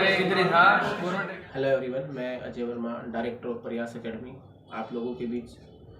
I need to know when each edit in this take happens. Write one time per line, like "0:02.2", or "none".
0:01.1